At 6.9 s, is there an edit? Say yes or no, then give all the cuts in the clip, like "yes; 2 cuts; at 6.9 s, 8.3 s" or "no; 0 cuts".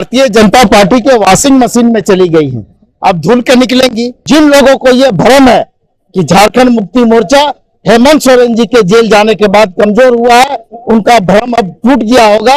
no; 1 cut; at 4.2 s